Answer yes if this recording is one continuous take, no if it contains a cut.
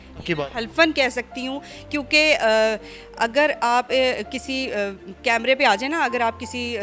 yes